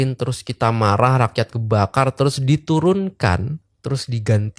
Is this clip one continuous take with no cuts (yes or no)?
no